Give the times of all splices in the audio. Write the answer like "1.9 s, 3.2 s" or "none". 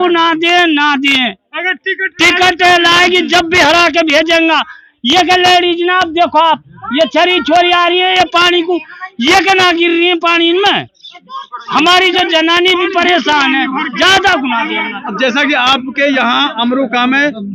none

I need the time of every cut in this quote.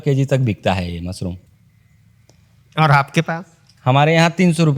none

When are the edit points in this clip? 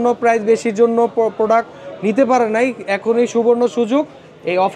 none

